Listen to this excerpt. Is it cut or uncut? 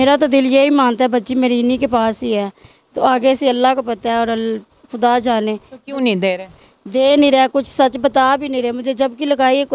uncut